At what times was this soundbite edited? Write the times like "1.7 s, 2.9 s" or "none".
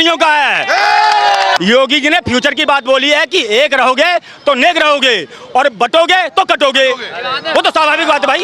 1.6 s